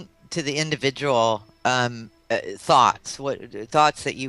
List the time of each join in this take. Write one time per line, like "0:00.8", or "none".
0:03.0